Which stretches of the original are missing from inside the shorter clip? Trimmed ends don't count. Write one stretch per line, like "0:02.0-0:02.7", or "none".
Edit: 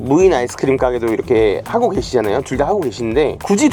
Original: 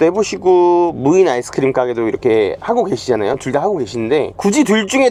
none